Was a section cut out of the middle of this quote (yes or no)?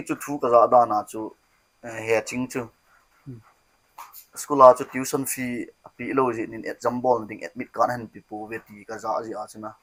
no